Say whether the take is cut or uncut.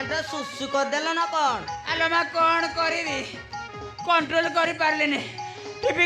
uncut